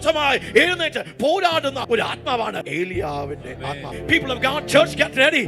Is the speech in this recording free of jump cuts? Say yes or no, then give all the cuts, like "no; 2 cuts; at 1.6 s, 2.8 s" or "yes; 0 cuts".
no; 3 cuts; at 1.8 s, 2.7 s, 3.9 s